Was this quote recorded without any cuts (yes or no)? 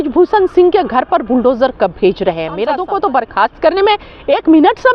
no